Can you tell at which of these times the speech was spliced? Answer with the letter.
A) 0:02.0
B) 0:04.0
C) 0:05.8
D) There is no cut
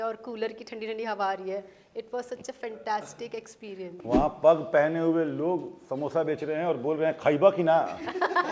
B